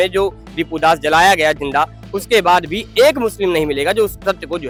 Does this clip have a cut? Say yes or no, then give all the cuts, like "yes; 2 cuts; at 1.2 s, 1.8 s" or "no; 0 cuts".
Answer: no; 0 cuts